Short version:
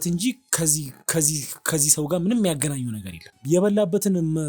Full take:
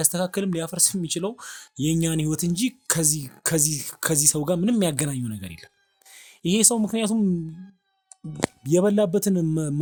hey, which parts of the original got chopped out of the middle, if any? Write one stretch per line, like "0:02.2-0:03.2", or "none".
0:05.8-0:08.6